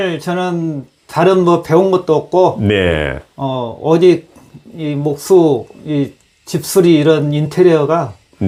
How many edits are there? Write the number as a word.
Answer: zero